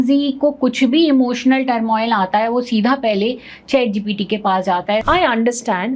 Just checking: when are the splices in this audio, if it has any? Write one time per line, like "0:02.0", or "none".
0:05.0